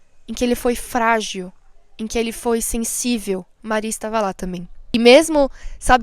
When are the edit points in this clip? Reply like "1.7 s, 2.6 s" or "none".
4.9 s